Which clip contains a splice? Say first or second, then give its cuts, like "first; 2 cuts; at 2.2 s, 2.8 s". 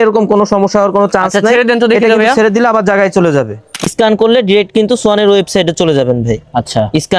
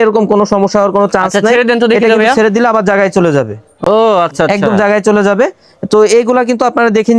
first; 1 cut; at 3.8 s